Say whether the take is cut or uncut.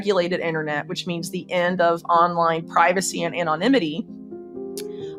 uncut